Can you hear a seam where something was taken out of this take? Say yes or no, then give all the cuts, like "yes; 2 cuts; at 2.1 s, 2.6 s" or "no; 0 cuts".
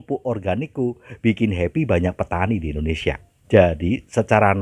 no; 0 cuts